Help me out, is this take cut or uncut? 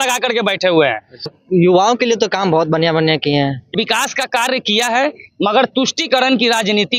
cut